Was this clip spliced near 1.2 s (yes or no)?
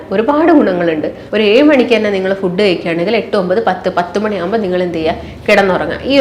yes